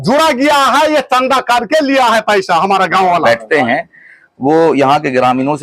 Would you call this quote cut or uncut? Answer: cut